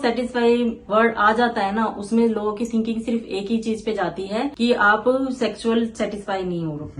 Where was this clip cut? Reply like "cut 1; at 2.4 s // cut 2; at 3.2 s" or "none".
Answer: none

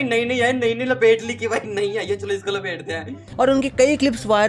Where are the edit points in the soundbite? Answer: cut 1; at 3.3 s

